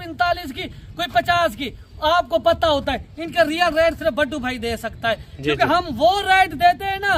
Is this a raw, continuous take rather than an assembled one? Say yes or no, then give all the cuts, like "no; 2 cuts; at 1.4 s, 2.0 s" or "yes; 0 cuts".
yes; 0 cuts